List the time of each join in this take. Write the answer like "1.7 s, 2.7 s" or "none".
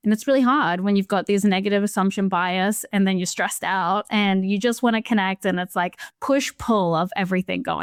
none

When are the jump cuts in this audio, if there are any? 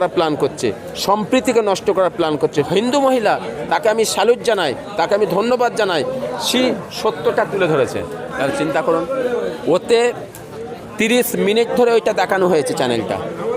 2.6 s, 3.5 s, 8.3 s

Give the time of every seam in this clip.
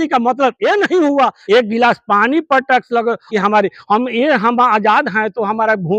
1.4 s, 3.2 s

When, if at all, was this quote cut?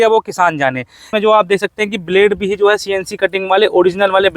1.0 s

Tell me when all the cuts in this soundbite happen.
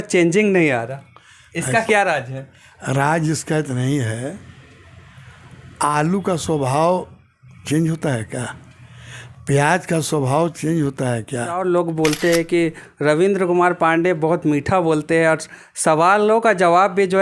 11.6 s

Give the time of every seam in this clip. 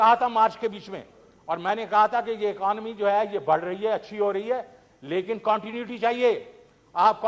none

